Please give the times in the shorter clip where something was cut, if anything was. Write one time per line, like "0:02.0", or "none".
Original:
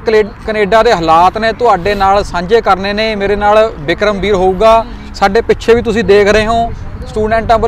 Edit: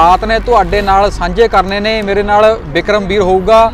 none